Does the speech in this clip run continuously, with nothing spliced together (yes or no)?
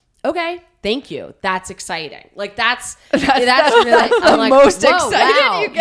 yes